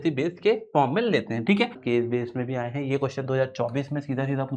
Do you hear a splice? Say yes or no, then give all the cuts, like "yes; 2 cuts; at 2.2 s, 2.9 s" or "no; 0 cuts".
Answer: yes; 1 cut; at 1.8 s